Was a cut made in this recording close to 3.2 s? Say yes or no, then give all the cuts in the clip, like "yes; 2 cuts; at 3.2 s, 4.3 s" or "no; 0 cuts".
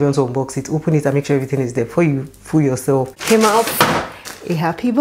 yes; 1 cut; at 3.2 s